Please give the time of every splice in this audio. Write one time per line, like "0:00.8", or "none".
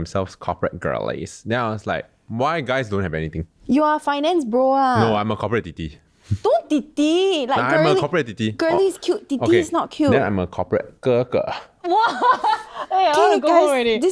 none